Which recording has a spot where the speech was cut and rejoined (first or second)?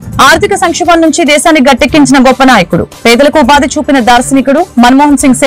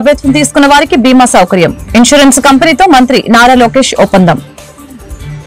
second